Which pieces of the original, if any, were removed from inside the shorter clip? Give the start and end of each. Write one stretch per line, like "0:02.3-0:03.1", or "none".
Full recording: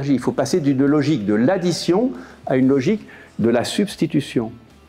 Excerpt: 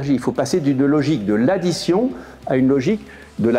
none

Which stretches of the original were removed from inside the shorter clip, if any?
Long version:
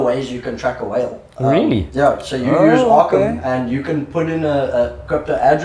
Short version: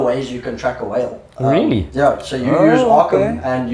none

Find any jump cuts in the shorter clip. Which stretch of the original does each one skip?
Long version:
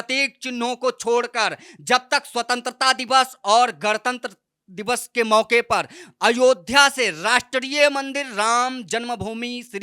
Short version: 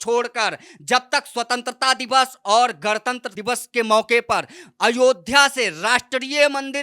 0:04.3-0:04.7

